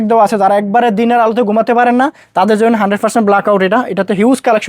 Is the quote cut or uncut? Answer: uncut